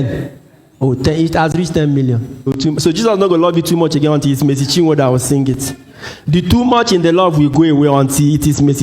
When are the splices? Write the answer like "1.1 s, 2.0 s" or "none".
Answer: 2.5 s